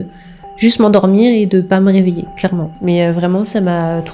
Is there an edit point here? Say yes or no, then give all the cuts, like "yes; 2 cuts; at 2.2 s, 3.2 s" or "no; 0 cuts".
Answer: yes; 1 cut; at 2.7 s